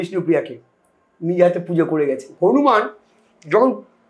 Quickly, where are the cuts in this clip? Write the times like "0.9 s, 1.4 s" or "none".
2.3 s